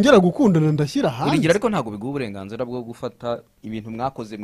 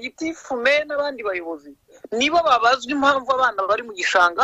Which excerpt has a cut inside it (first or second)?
first